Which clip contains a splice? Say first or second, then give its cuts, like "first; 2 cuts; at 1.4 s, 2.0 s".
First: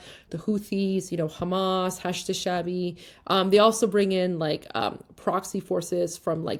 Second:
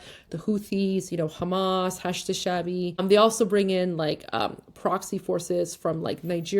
second; 1 cut; at 3.0 s